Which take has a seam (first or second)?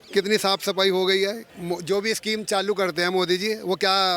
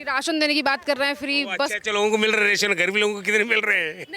first